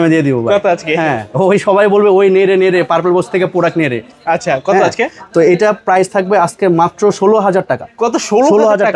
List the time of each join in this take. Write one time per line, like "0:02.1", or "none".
none

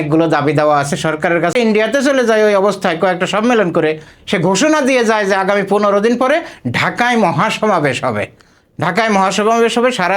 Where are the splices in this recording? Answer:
0:01.6

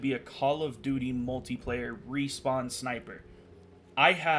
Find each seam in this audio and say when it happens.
none

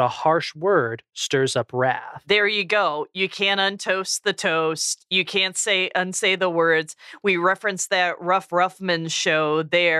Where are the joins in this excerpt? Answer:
0:02.1

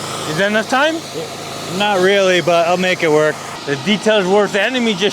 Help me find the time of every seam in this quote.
0:03.5

